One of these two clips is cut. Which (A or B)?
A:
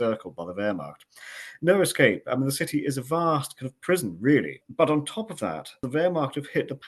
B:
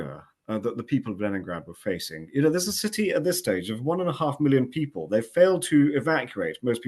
A